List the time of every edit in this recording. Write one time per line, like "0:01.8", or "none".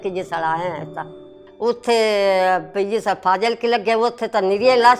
0:01.2